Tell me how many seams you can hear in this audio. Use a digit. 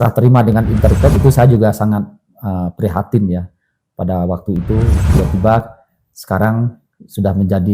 2